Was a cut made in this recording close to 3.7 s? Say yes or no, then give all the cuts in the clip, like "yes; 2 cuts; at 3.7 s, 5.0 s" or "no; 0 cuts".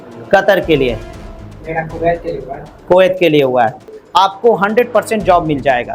yes; 1 cut; at 3.7 s